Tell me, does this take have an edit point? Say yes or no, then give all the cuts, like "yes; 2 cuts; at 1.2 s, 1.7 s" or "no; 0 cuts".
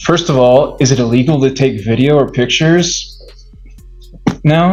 no; 0 cuts